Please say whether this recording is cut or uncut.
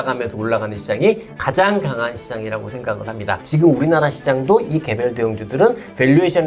uncut